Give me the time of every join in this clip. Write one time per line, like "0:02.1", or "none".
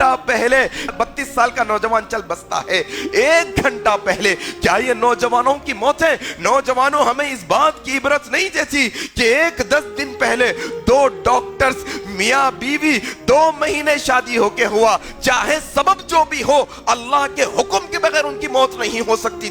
0:00.9